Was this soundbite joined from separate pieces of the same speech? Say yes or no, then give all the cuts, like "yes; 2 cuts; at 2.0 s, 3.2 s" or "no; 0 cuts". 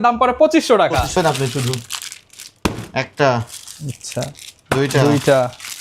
yes; 1 cut; at 1.1 s